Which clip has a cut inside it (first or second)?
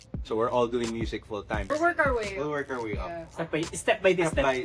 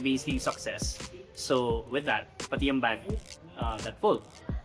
first